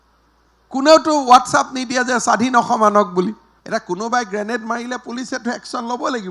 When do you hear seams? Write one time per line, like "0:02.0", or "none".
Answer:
0:03.5